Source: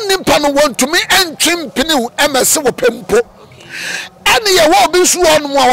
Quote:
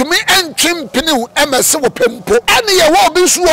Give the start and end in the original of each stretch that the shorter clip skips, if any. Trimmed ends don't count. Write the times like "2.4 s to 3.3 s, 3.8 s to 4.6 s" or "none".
3.3 s to 4.2 s